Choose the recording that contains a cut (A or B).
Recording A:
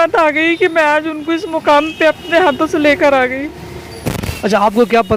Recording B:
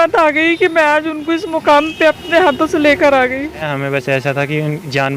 B